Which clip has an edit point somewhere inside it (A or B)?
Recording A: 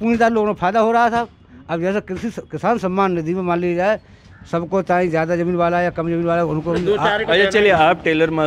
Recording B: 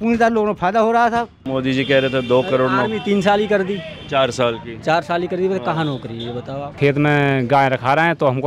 B